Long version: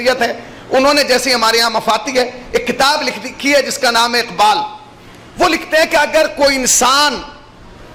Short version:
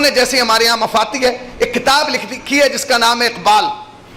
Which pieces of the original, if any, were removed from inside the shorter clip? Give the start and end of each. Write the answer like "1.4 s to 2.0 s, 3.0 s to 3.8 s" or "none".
none